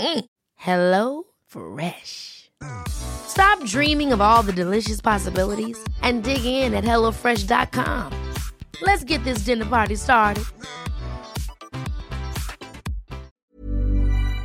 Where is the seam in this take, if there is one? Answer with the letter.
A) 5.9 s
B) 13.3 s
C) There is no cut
B